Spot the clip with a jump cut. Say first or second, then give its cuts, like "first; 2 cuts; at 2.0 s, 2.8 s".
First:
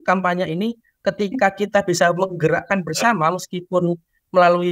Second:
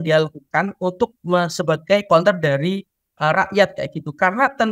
second; 1 cut; at 2.0 s